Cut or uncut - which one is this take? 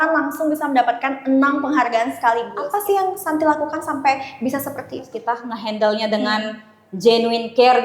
cut